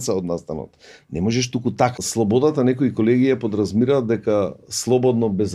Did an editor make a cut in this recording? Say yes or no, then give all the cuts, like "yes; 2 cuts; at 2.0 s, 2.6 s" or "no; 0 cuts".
yes; 1 cut; at 2.0 s